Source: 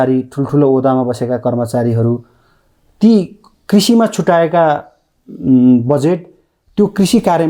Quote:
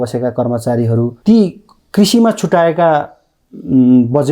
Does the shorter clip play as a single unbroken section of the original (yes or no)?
no